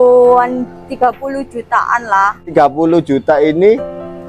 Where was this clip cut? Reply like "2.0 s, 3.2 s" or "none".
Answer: 2.5 s